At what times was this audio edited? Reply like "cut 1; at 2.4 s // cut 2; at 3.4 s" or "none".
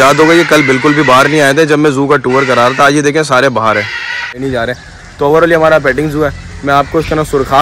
cut 1; at 4.3 s